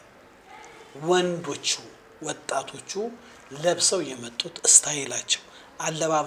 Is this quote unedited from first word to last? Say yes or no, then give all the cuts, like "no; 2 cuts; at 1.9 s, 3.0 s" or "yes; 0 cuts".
yes; 0 cuts